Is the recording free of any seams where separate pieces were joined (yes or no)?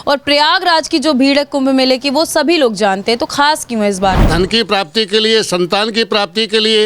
no